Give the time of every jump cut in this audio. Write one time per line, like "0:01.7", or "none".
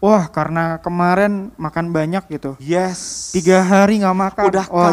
none

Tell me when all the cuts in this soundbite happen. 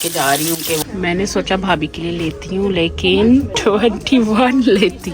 0:00.8
0:03.5

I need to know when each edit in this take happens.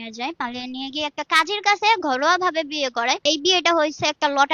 0:03.2

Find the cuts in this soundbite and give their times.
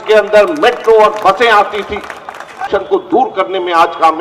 0:02.6

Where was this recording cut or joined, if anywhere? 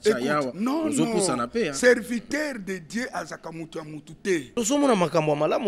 0:04.5

